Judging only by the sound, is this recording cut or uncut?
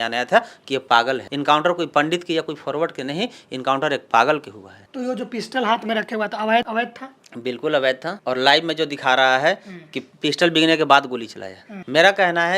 cut